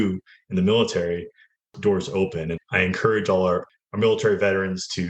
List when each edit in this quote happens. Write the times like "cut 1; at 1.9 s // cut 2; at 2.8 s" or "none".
cut 1; at 1.7 s // cut 2; at 2.6 s // cut 3; at 3.8 s